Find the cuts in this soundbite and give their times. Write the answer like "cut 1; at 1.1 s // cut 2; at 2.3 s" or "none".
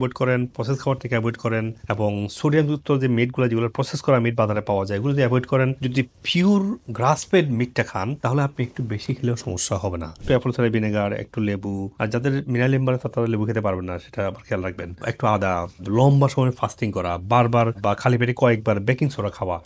cut 1; at 10.1 s